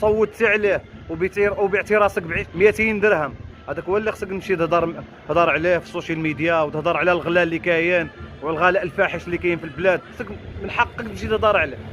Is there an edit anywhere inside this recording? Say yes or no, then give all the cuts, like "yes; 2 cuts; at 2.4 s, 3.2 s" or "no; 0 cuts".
no; 0 cuts